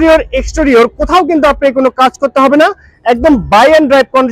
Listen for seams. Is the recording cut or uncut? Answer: uncut